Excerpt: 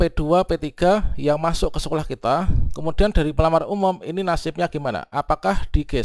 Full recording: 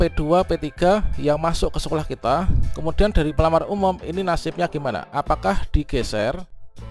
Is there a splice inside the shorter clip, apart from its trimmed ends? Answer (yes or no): no